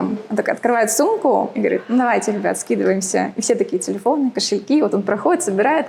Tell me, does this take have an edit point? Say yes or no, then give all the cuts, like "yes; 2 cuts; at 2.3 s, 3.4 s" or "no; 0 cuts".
no; 0 cuts